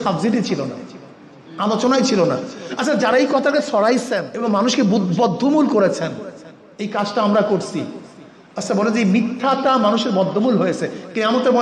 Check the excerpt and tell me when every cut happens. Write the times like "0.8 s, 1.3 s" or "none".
4.3 s